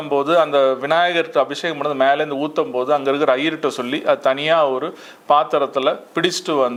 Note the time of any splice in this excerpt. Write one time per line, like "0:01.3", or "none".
none